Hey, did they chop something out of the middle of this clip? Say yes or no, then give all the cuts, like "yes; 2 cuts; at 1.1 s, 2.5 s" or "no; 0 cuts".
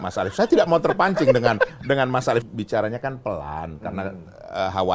yes; 1 cut; at 2.4 s